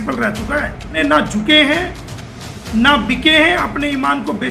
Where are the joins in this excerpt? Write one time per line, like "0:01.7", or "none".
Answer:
0:01.0